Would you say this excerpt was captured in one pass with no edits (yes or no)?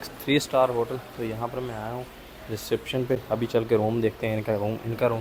yes